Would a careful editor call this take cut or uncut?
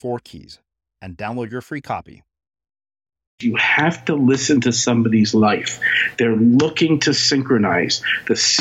cut